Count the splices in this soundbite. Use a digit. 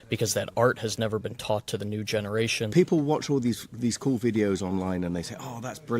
1